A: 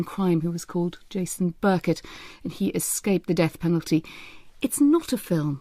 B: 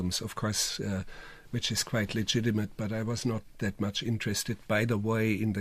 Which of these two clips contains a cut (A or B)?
A